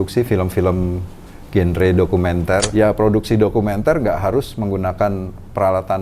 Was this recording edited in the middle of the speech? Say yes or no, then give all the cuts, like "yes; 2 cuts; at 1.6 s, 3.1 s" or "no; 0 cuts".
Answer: yes; 1 cut; at 2.7 s